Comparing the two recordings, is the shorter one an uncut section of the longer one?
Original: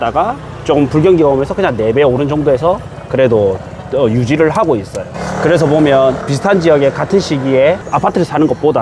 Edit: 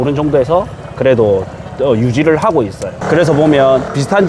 no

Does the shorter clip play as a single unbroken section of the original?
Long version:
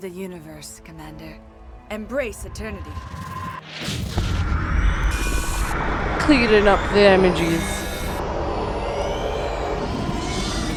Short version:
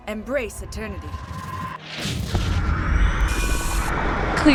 yes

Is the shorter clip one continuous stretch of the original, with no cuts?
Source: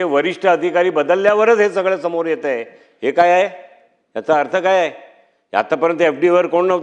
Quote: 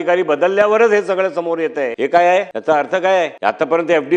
no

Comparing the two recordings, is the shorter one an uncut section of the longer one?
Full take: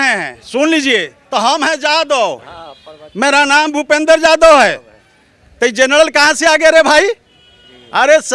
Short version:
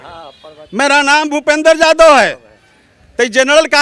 yes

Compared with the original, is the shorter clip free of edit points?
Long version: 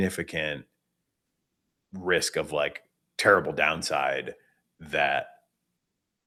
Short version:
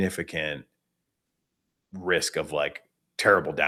yes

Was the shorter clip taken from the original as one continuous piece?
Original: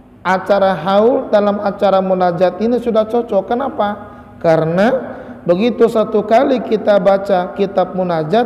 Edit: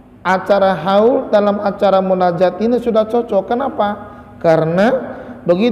yes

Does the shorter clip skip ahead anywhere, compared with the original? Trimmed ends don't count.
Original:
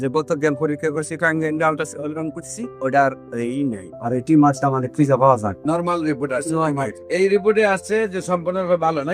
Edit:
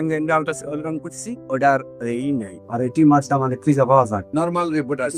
no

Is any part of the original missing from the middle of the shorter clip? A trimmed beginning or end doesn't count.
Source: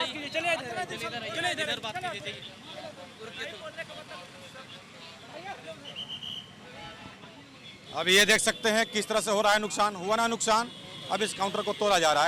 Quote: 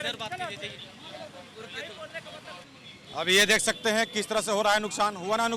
yes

